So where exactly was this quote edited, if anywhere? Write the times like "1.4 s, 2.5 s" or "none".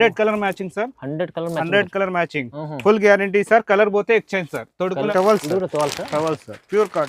5.1 s